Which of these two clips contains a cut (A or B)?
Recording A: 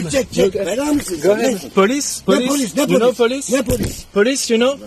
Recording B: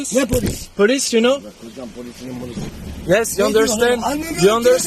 B